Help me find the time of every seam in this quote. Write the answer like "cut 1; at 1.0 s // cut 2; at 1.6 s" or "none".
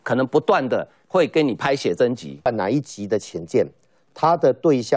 cut 1; at 2.5 s